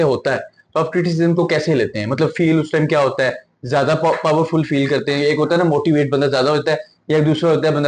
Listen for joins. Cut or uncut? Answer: uncut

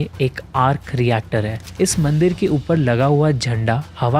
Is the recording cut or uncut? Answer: cut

